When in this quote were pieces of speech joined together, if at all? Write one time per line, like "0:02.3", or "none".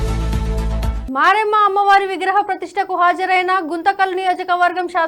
0:00.9